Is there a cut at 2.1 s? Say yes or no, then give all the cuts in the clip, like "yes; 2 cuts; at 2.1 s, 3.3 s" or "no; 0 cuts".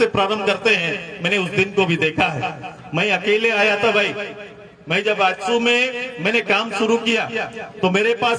no; 0 cuts